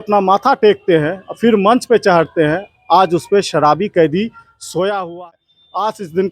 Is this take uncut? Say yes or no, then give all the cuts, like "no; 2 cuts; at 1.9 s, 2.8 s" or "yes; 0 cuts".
no; 1 cut; at 5.2 s